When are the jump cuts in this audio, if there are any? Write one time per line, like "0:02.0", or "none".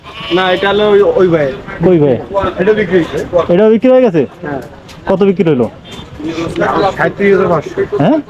none

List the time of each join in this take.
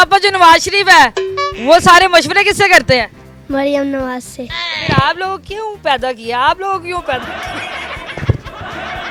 none

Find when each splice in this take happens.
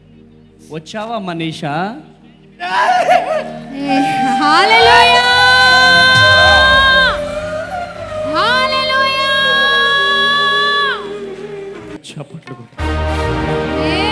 0:12.0

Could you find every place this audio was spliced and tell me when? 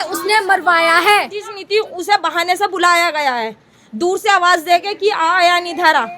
0:01.5

